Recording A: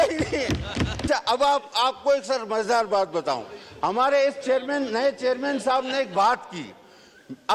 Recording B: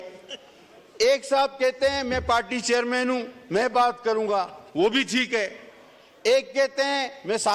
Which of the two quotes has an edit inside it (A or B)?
A